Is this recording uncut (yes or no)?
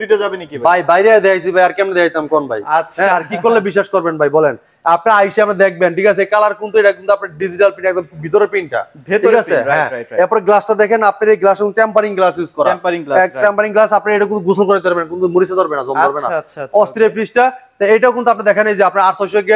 yes